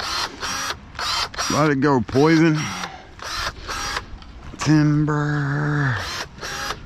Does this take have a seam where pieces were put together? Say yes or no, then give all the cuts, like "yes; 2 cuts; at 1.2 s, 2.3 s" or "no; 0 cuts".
yes; 1 cut; at 4.4 s